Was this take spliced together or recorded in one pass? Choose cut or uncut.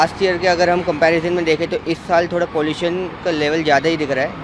uncut